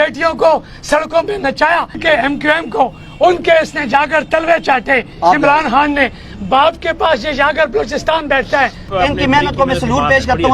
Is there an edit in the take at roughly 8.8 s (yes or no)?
yes